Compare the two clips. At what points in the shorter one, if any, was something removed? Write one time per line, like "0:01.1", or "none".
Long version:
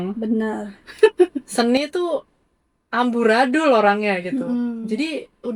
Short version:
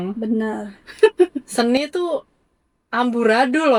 none